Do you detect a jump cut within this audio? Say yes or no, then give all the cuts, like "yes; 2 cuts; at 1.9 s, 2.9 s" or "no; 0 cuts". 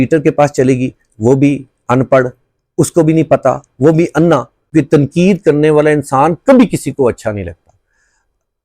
yes; 1 cut; at 4.6 s